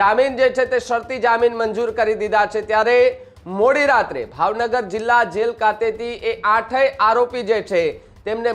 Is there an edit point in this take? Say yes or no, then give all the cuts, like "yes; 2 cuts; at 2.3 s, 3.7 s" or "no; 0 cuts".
no; 0 cuts